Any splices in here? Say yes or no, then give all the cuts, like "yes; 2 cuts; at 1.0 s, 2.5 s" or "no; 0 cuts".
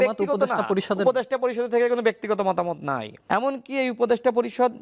yes; 1 cut; at 3.1 s